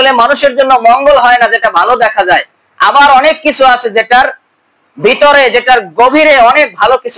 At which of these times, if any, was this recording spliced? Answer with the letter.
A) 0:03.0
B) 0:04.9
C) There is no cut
C